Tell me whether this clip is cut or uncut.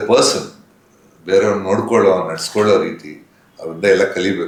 uncut